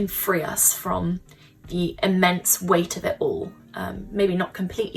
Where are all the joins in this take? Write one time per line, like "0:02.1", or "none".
none